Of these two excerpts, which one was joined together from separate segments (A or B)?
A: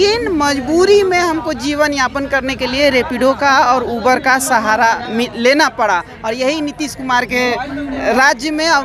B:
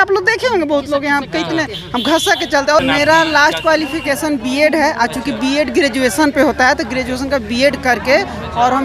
B